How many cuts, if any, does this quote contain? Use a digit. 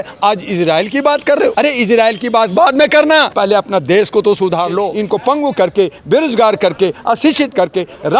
3